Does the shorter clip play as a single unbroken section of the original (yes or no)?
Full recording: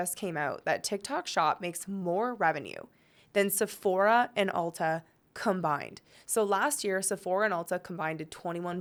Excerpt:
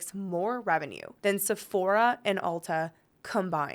no